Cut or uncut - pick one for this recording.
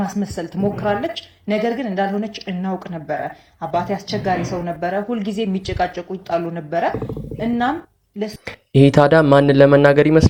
uncut